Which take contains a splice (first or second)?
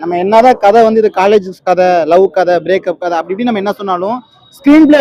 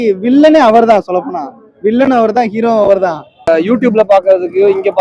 second